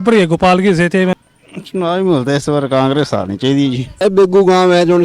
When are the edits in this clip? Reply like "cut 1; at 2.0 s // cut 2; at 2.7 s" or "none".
cut 1; at 1.3 s // cut 2; at 4.0 s